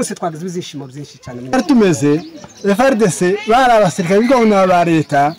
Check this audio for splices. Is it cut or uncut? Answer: cut